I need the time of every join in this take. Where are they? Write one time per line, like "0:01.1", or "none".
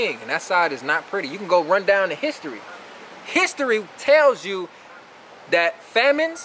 none